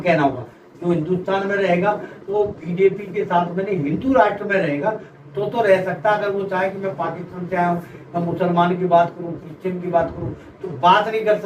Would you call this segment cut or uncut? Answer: uncut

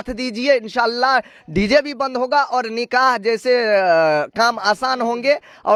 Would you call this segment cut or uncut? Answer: uncut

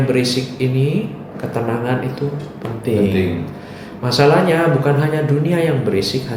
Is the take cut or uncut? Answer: uncut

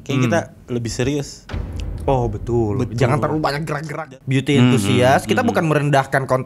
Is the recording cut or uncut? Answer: cut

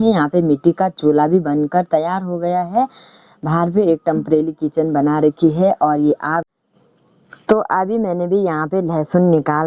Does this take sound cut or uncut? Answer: cut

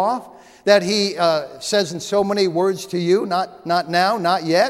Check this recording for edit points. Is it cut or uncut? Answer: uncut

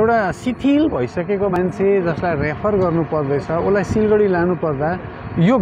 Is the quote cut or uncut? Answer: cut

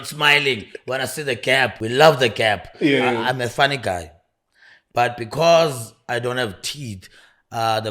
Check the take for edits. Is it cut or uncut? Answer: cut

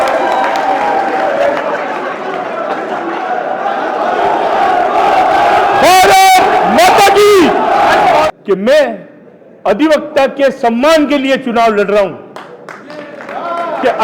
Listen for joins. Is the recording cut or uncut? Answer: cut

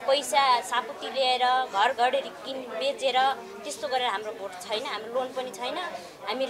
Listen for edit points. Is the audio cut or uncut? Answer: uncut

